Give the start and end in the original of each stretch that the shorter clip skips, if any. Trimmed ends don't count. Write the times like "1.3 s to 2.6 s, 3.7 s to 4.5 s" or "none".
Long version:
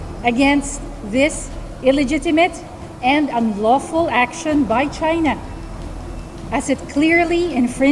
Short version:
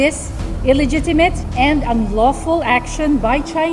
2.6 s to 2.9 s